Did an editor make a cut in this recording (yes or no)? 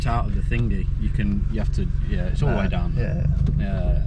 no